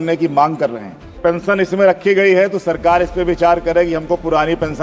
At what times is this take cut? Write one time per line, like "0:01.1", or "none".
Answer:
0:01.2